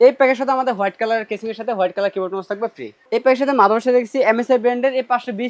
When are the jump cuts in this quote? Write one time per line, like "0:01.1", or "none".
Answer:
0:02.9